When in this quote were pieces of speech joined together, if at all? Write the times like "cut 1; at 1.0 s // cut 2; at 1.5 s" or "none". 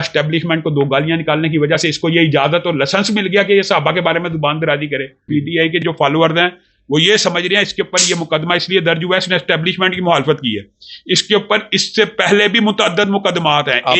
cut 1; at 5.2 s